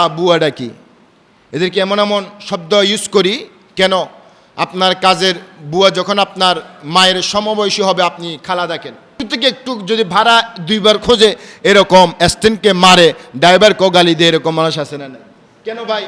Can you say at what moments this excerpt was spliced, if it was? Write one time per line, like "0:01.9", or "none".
0:09.2